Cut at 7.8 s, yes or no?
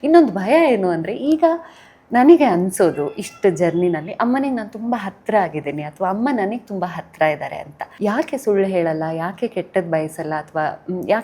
yes